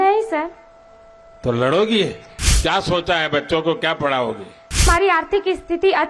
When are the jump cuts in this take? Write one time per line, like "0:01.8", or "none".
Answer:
0:02.3
0:04.8